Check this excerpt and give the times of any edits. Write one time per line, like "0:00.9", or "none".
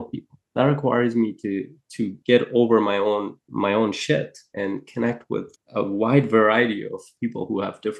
0:03.4
0:04.5
0:05.6